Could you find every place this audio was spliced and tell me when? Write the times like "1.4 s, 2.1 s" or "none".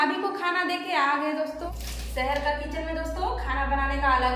1.6 s